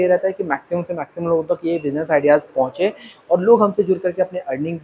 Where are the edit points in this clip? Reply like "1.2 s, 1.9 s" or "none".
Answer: none